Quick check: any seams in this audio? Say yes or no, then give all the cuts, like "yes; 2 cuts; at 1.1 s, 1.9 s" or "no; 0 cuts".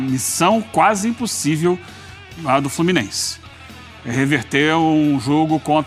no; 0 cuts